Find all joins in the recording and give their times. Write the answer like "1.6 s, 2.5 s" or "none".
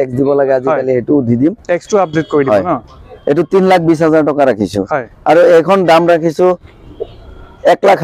none